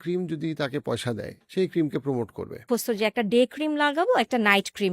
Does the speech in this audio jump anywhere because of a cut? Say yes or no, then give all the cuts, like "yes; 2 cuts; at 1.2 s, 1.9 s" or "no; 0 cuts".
yes; 2 cuts; at 1.3 s, 2.6 s